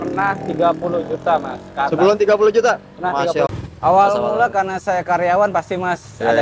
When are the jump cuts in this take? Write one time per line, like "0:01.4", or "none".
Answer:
0:03.5